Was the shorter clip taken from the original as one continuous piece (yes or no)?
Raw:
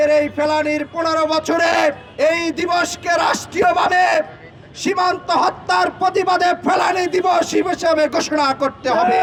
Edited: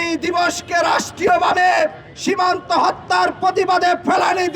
no